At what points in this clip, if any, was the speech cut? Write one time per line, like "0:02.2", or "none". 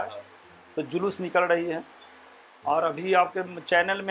none